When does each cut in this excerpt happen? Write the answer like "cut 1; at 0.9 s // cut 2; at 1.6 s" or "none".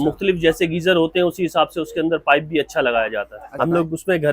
cut 1; at 3.4 s